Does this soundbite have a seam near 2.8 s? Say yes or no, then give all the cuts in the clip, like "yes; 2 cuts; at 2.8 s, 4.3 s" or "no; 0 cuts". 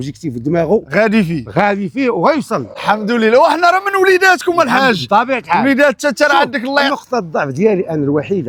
no; 0 cuts